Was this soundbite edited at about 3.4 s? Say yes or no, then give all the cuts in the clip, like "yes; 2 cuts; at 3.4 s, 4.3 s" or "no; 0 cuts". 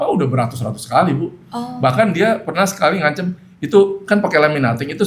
no; 0 cuts